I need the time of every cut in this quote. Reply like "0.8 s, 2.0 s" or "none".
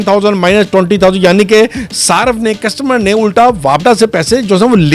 none